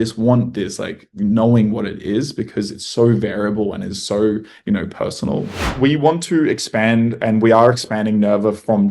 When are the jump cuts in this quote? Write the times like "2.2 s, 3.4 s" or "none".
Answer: 5.6 s